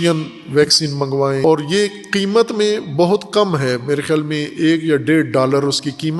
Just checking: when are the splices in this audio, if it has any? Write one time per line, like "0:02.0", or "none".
0:01.4